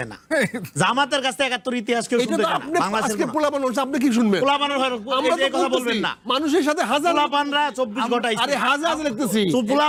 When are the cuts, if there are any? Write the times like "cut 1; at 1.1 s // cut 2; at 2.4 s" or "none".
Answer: none